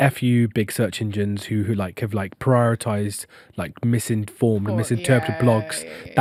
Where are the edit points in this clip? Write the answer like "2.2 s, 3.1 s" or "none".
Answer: none